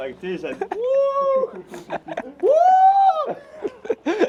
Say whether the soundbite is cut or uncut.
uncut